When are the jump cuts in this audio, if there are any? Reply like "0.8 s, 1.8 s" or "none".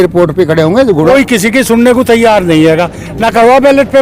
1.1 s

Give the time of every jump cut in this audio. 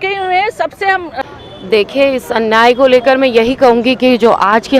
1.2 s

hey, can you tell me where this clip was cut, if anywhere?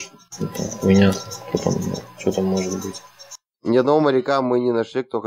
3.5 s

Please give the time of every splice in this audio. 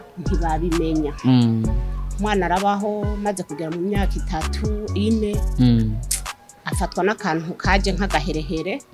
none

